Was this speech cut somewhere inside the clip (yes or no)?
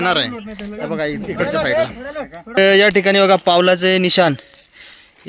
yes